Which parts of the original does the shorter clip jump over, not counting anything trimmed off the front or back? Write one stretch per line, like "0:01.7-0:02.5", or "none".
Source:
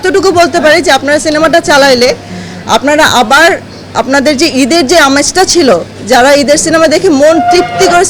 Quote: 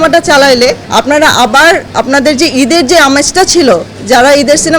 0:02.2-0:02.6
0:03.6-0:03.9